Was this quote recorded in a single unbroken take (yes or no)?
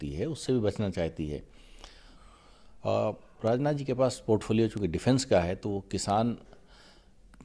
no